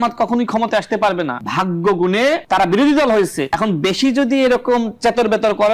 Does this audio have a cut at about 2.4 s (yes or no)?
yes